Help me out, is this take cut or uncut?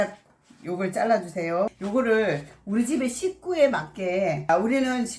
cut